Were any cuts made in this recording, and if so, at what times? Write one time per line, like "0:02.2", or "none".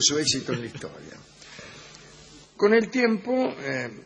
0:02.9